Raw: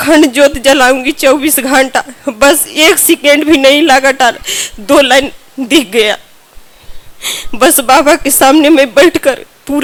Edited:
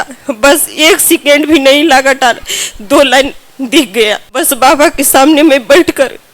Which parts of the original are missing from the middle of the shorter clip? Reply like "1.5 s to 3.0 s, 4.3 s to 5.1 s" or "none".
6.3 s to 7.6 s